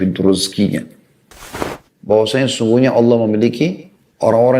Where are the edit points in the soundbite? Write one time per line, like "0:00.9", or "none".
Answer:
0:01.6